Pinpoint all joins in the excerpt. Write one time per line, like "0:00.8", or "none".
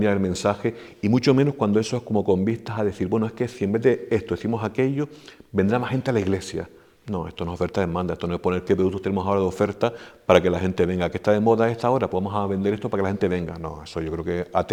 none